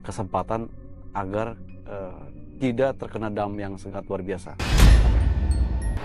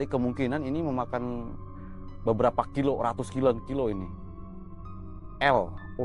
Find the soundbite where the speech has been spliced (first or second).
first